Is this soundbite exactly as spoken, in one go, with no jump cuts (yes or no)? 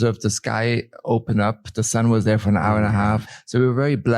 no